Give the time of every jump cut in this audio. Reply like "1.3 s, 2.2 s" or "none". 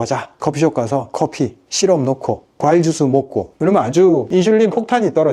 3.5 s